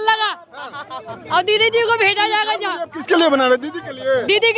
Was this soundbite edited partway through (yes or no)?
no